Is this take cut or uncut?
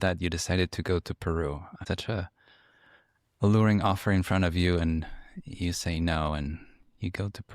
cut